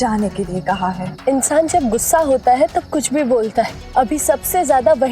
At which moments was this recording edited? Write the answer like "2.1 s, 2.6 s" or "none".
1.1 s, 3.8 s